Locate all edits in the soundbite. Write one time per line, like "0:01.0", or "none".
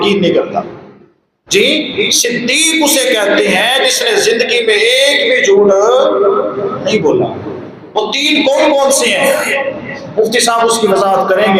none